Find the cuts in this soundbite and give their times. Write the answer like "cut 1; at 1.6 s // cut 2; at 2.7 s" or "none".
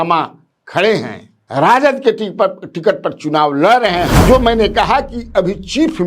cut 1; at 4.2 s